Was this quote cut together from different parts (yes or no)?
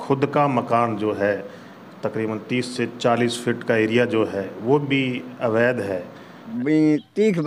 yes